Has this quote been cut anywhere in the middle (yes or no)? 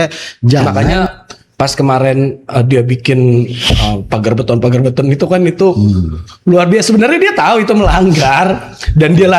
yes